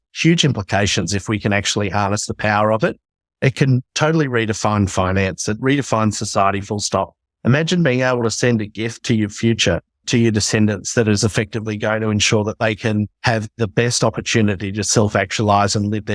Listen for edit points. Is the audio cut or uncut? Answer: cut